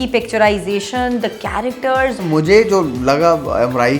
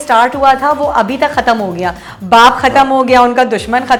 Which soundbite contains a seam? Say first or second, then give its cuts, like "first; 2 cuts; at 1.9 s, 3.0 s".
first; 1 cut; at 2.2 s